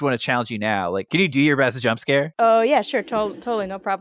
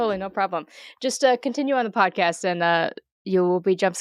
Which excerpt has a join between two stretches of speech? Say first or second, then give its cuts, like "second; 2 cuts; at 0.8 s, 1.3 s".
first; 2 cuts; at 1.0 s, 2.3 s